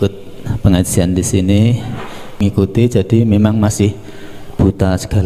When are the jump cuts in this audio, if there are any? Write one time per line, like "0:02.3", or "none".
0:02.4

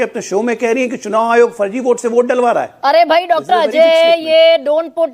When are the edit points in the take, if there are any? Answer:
none

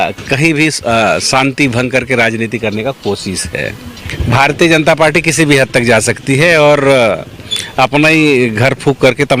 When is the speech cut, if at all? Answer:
0:04.1

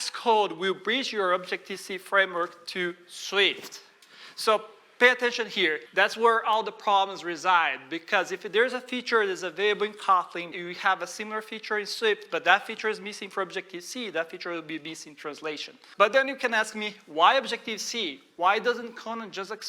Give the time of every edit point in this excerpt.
0:05.8
0:10.5
0:15.8

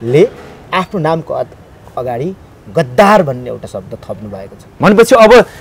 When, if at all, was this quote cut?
none

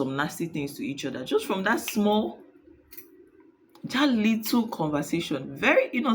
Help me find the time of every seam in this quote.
none

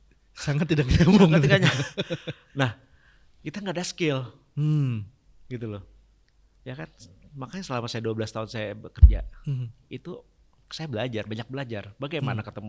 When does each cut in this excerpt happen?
none

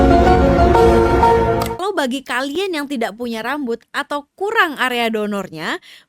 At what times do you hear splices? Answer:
0:01.6

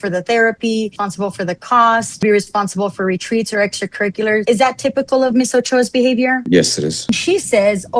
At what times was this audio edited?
0:01.0
0:02.2
0:04.4
0:07.1

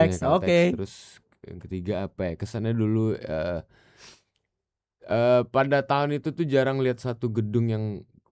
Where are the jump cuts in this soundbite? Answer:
none

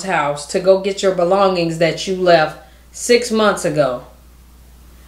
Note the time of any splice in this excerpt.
none

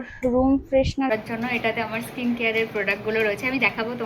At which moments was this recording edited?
0:01.1

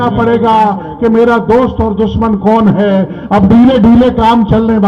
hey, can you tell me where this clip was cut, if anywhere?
none

